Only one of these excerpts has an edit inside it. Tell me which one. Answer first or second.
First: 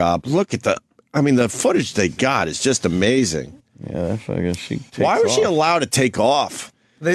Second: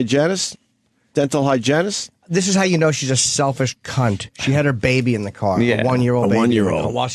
first